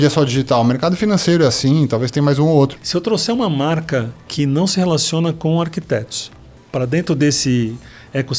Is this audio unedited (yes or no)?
no